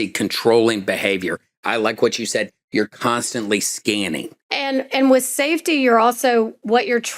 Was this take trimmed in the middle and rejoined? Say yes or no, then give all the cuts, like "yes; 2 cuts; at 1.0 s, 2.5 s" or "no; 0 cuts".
yes; 1 cut; at 4.4 s